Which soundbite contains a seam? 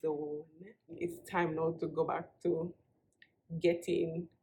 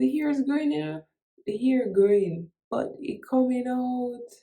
second; 1 cut; at 2.5 s

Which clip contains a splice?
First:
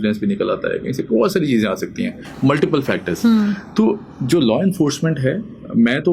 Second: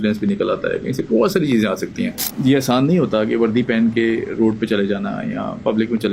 second; 1 cut; at 2.2 s

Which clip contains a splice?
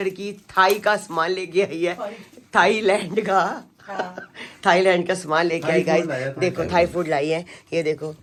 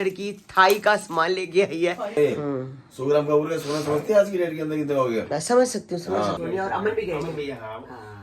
second; 2 cuts; at 2.1 s, 6.4 s

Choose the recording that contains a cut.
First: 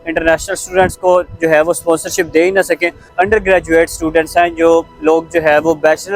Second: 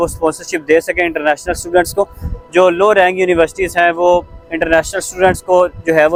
first; 1 cut; at 3.1 s

